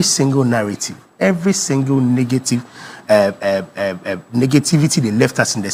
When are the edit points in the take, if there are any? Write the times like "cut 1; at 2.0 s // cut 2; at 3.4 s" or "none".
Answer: none